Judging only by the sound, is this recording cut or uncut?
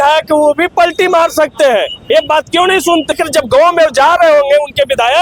uncut